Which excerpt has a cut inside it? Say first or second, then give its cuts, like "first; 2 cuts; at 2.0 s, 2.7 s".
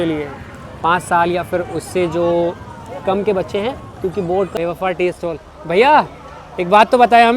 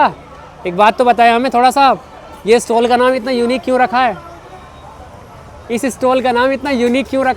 first; 1 cut; at 4.6 s